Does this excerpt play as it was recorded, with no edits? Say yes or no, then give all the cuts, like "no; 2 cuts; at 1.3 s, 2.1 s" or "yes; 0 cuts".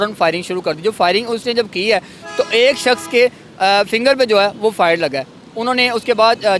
yes; 0 cuts